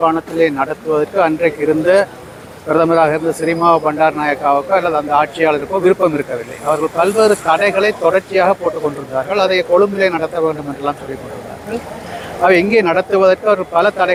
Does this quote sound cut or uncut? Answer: uncut